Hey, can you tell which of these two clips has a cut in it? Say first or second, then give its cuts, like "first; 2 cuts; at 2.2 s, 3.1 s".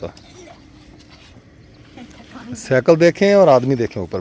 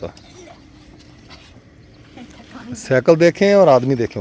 first; 1 cut; at 1.1 s